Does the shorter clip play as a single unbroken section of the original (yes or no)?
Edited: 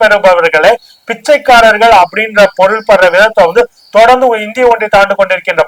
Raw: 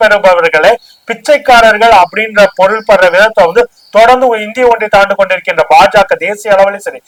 yes